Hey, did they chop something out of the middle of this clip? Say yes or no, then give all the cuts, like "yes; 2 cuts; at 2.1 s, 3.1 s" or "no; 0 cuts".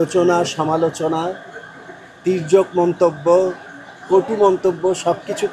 no; 0 cuts